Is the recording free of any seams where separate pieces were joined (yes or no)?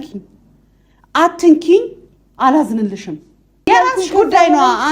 no